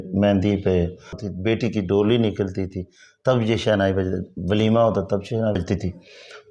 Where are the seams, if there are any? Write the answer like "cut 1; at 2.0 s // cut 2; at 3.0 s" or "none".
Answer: cut 1; at 1.2 s // cut 2; at 5.6 s

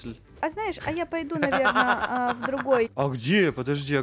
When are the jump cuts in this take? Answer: cut 1; at 2.9 s

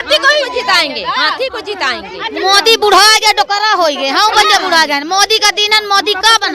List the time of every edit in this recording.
cut 1; at 2.2 s

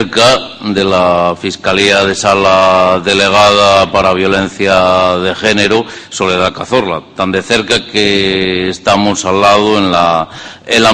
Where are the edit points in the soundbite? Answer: cut 1; at 3.9 s

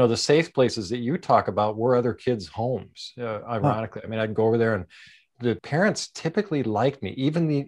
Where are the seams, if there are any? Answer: cut 1; at 5.4 s

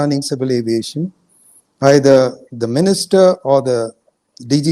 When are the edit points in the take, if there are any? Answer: none

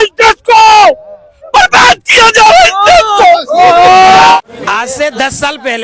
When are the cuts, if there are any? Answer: cut 1; at 4.4 s

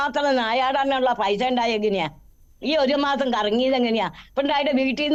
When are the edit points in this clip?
none

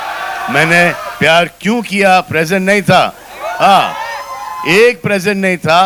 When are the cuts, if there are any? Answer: none

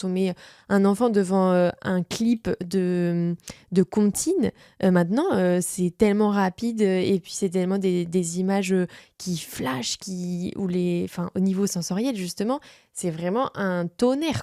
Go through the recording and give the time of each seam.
none

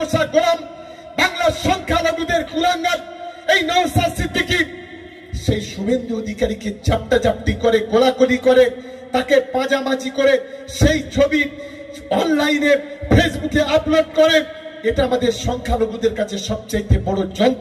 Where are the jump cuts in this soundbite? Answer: none

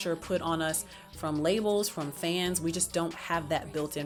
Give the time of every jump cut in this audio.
none

